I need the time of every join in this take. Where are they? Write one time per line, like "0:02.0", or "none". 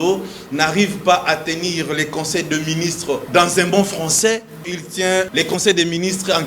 0:03.2
0:05.0